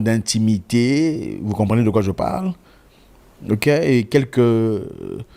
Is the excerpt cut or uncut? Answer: uncut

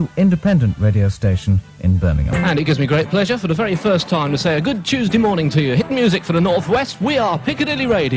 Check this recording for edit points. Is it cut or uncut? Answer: cut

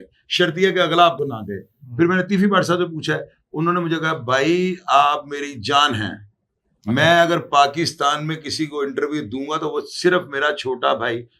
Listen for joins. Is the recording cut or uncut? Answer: uncut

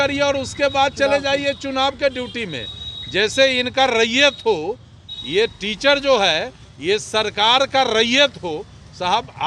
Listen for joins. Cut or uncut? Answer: uncut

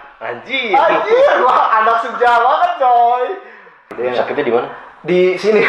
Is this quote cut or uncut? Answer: cut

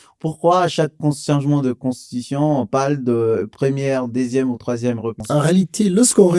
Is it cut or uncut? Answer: cut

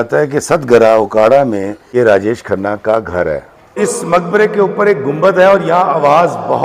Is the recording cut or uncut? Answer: cut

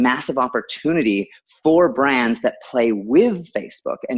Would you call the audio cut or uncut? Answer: uncut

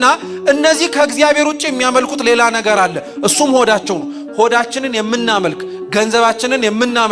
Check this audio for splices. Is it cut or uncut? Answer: uncut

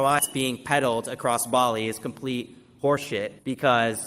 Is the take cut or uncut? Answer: uncut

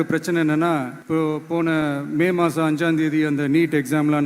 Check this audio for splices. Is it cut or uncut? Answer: cut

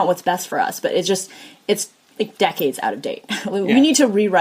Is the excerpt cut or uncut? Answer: uncut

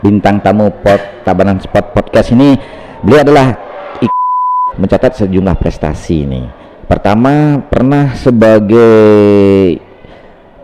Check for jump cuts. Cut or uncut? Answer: cut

